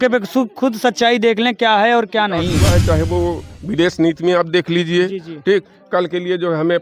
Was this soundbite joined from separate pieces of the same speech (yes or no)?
yes